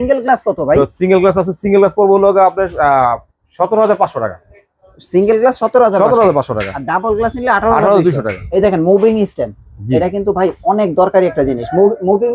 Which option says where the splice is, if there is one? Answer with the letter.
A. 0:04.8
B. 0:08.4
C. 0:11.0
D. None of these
B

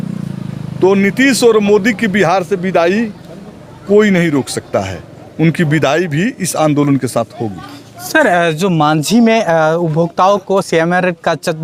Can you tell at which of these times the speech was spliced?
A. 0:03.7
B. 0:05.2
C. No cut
C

